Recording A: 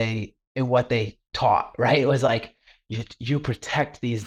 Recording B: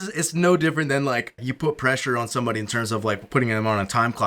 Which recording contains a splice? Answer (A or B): B